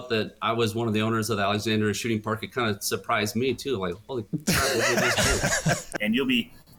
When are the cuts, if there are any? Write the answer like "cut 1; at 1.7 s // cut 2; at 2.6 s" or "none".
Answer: cut 1; at 5.9 s